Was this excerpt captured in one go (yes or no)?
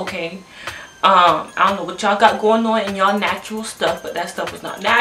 yes